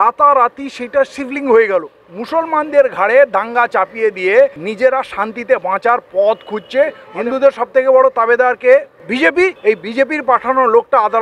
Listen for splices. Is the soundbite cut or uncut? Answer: cut